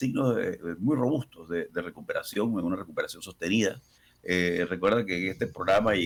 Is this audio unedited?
yes; 0 cuts

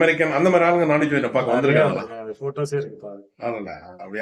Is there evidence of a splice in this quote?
no; 0 cuts

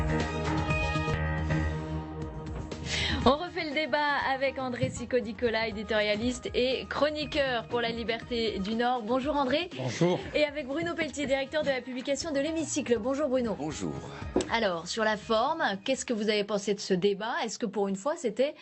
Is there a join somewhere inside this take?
yes; 1 cut; at 9.1 s

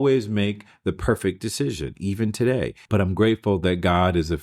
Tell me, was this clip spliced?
yes; 1 cut; at 2.8 s

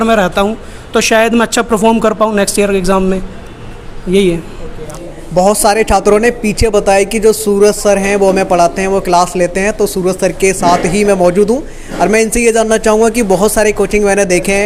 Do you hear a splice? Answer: no; 0 cuts

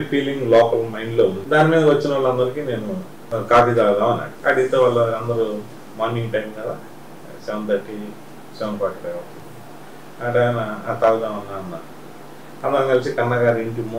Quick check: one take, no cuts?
no; 3 cuts; at 1.4 s, 3.1 s, 4.3 s

